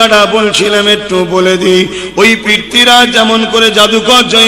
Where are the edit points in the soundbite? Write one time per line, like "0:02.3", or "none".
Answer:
none